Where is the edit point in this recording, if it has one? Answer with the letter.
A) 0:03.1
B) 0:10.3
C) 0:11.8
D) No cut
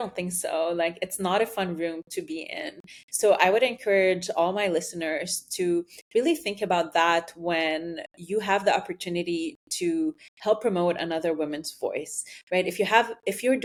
D